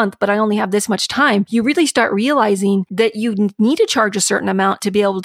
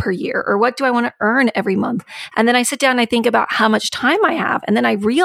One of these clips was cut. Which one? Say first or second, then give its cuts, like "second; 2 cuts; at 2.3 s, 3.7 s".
first; 2 cuts; at 1.5 s, 2.9 s